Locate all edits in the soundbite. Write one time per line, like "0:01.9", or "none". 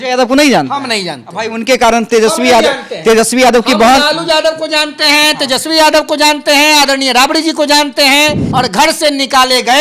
0:08.4